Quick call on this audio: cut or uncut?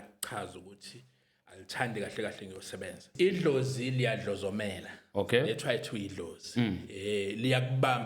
cut